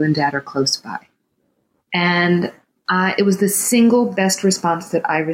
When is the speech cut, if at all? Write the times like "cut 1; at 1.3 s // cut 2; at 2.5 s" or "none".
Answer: none

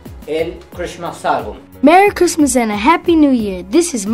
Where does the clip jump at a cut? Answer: cut 1; at 1.6 s

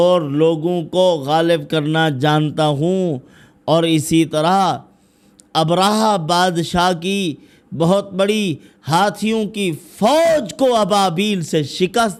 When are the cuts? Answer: none

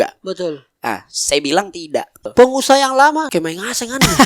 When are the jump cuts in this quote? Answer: cut 1; at 2.3 s // cut 2; at 3.3 s

